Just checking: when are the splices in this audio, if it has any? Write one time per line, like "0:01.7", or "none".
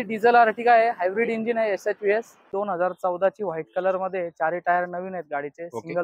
0:02.5